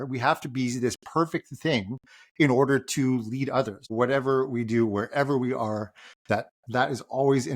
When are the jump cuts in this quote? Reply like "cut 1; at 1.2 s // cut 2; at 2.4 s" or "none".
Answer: cut 1; at 3.8 s